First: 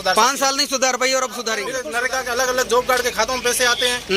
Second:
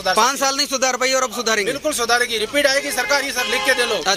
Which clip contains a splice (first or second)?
first